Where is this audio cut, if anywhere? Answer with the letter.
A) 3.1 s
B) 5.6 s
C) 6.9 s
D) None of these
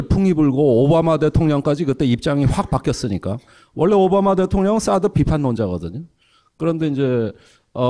C